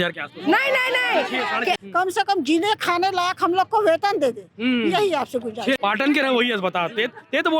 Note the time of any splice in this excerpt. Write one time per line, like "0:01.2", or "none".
0:01.8
0:05.8

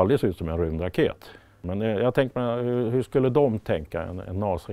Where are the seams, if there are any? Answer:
0:01.6

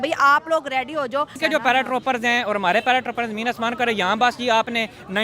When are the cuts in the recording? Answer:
0:01.4

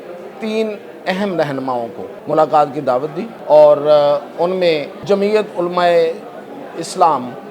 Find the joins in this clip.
0:02.1
0:03.3
0:04.9

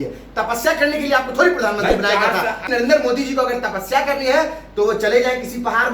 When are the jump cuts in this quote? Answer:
0:02.7

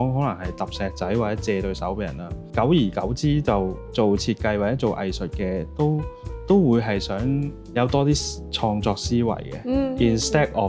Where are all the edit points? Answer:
0:02.4
0:03.8
0:07.6

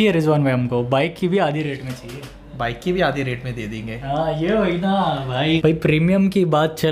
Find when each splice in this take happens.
0:05.6

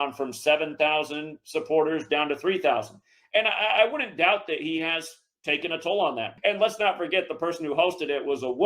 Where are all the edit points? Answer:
0:03.2
0:06.3

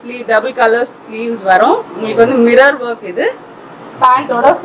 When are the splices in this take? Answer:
none

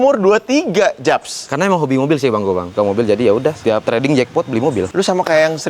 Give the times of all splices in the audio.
0:02.7
0:04.9

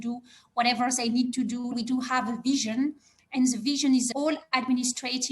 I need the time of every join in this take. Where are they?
0:01.7

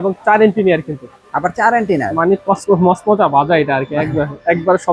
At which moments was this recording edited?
none

